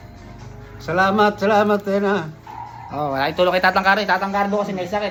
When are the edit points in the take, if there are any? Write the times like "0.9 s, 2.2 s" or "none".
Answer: none